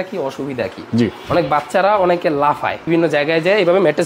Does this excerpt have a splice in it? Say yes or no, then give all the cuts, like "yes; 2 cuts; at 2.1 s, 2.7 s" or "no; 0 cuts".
yes; 1 cut; at 2.8 s